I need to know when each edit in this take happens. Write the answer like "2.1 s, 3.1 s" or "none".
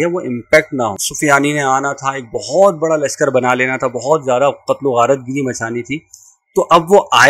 1.0 s